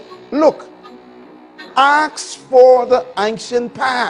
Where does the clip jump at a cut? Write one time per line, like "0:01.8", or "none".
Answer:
none